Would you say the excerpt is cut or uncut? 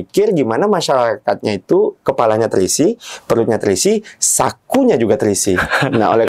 uncut